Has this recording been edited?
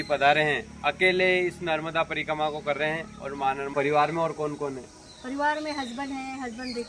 yes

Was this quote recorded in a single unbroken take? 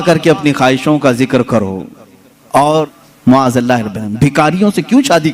no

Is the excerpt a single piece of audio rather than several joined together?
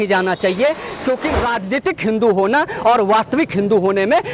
no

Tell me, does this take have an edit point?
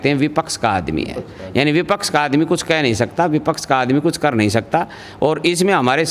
no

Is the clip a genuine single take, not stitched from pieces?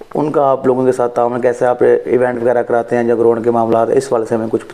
yes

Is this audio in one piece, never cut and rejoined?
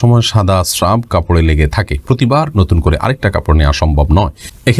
yes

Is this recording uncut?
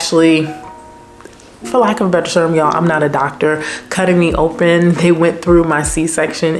yes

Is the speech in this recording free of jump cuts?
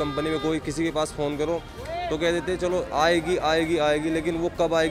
yes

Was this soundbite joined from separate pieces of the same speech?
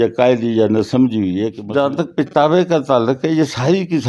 yes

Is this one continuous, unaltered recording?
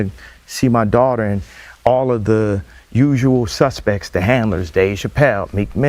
yes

